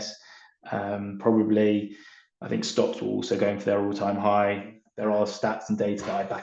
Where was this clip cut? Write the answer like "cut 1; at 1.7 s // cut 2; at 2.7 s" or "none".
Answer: cut 1; at 4.9 s